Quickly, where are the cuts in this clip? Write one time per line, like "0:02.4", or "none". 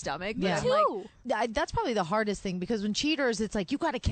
0:01.2